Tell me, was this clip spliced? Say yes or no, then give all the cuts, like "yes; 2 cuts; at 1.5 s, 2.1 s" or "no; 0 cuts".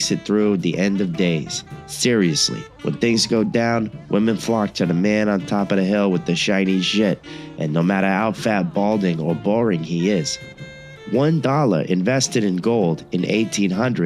no; 0 cuts